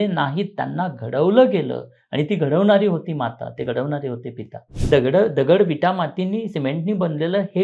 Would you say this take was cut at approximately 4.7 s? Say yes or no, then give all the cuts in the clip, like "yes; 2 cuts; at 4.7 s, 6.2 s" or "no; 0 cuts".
yes; 1 cut; at 4.7 s